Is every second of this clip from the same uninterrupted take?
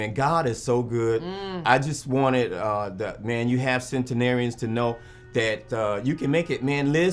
yes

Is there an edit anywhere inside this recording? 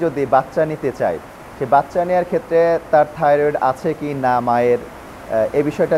no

